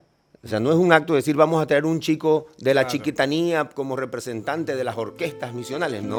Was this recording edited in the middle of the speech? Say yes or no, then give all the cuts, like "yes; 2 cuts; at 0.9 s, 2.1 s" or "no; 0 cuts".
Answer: no; 0 cuts